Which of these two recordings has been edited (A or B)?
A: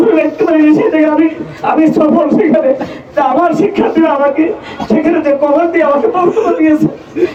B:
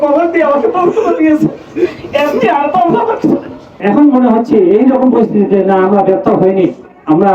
B